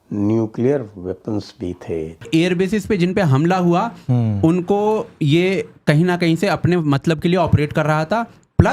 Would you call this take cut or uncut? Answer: uncut